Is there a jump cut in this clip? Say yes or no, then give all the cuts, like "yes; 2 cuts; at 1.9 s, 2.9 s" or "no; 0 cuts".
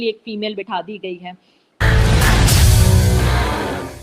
yes; 1 cut; at 1.8 s